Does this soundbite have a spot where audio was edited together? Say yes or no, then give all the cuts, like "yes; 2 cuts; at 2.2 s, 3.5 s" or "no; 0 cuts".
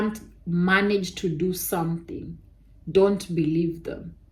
no; 0 cuts